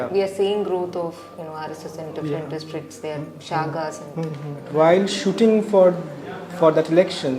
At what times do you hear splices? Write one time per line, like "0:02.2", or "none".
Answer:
0:04.7